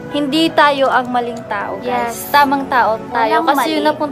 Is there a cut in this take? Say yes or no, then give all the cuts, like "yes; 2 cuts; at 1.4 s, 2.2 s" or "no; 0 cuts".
no; 0 cuts